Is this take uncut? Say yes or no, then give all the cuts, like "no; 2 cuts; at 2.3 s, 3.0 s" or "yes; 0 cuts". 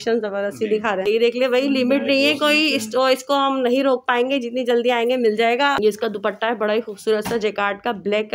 no; 2 cuts; at 1.0 s, 5.8 s